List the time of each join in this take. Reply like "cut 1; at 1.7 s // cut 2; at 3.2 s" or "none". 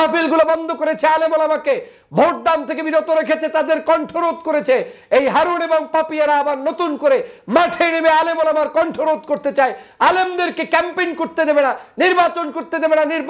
none